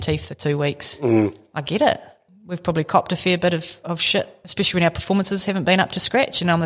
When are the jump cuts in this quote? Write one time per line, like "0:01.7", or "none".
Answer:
0:02.2
0:04.4

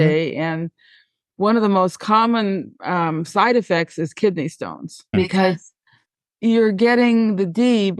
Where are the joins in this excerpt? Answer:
0:05.1

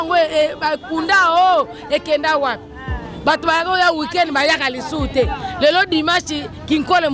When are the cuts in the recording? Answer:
none

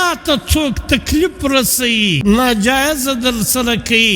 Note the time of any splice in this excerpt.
0:02.2

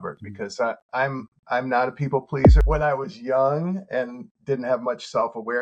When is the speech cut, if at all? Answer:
0:02.6

